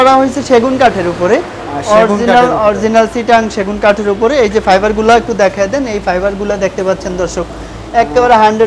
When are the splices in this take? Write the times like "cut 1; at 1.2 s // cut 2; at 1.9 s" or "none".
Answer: none